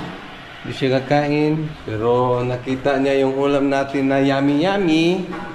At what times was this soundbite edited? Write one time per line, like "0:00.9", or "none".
0:01.8